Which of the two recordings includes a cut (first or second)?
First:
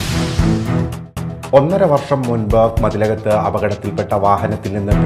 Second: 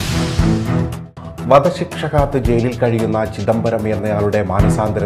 first